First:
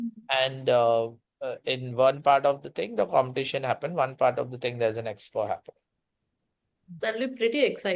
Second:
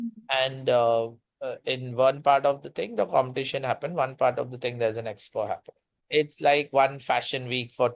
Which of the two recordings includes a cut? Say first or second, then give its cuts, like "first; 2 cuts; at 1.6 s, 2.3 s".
second; 1 cut; at 6.0 s